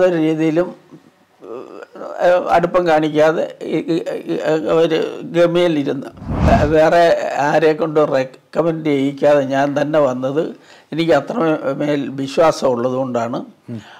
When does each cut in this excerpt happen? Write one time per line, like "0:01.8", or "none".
0:06.5